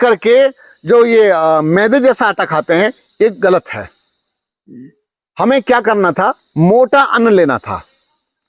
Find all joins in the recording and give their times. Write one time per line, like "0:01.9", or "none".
none

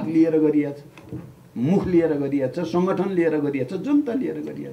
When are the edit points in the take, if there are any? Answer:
none

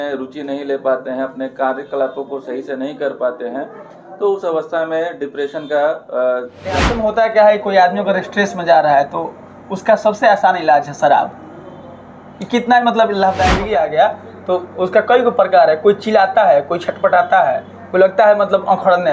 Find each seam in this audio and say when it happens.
0:06.9
0:13.6

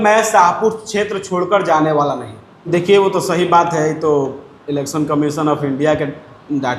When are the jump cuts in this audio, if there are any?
0:02.7

